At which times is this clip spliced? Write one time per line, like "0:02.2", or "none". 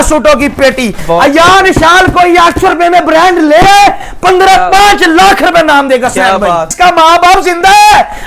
0:06.7